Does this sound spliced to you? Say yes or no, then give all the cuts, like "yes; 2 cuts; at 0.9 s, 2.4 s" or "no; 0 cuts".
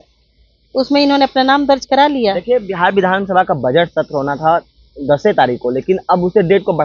no; 0 cuts